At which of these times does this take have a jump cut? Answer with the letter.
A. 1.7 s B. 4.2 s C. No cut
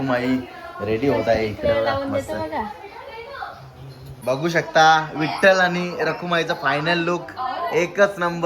B